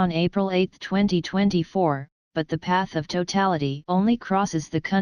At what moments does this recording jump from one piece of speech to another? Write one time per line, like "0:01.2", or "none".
0:04.1